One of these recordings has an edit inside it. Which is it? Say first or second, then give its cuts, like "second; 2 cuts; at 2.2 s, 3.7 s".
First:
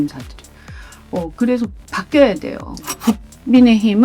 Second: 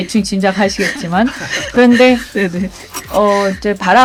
first; 1 cut; at 2.9 s